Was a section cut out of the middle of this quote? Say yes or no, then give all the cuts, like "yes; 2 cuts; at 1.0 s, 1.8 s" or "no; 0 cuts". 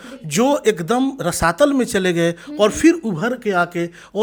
no; 0 cuts